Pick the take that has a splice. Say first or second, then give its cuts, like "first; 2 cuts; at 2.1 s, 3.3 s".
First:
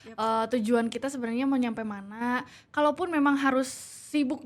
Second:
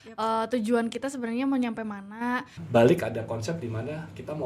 second; 1 cut; at 2.6 s